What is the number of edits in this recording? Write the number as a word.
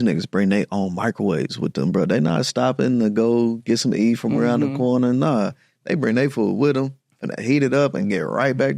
zero